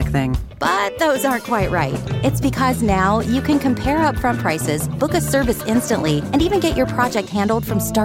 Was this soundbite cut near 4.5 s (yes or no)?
no